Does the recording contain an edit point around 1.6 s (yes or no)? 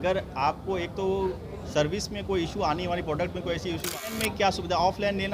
no